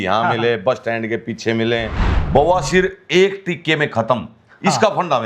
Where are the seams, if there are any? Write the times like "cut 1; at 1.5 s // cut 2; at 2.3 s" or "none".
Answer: cut 1; at 2.1 s